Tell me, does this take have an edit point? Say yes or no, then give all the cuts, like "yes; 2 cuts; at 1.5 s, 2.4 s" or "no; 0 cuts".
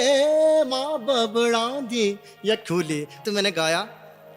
yes; 1 cut; at 3.2 s